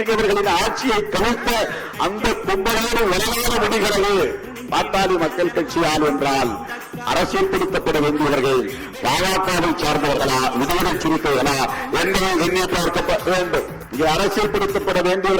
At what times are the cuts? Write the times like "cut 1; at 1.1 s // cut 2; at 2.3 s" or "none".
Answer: cut 1; at 13.8 s